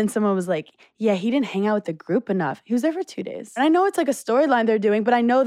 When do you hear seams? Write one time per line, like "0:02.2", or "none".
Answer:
0:03.6